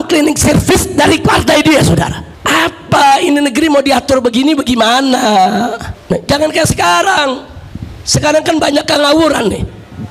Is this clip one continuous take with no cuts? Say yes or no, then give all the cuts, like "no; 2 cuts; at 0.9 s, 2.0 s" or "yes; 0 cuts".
no; 1 cut; at 5.9 s